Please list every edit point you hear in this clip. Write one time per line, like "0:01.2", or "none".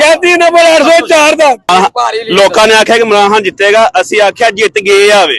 0:01.7